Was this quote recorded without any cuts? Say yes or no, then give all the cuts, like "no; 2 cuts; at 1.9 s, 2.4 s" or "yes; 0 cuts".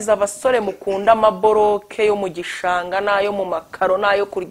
yes; 0 cuts